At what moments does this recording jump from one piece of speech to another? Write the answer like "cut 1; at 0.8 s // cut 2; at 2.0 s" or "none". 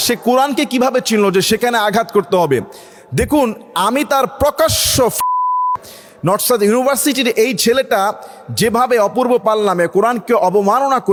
none